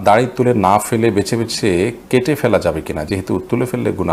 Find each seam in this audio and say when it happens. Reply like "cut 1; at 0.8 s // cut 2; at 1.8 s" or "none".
none